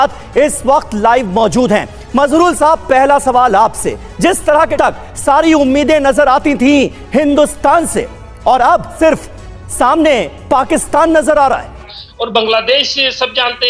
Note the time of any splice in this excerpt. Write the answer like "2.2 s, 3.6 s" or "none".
4.7 s, 8.9 s, 12.0 s

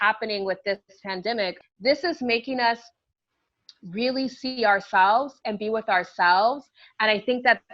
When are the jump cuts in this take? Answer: 1.6 s

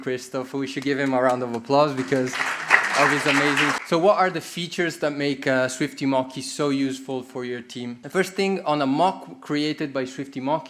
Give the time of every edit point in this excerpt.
3.7 s, 8.0 s

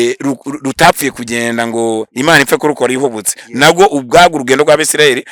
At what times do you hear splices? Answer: none

